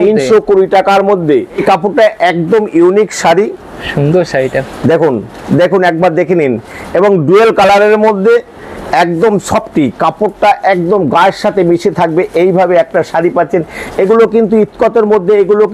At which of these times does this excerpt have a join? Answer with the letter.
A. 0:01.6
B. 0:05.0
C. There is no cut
A